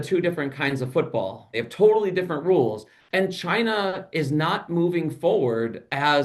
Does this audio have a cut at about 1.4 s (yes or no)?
yes